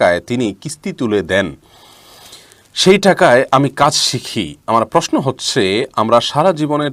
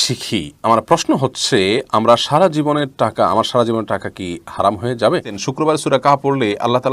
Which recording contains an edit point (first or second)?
second